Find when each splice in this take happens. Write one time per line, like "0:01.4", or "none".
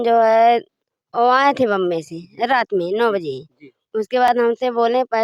none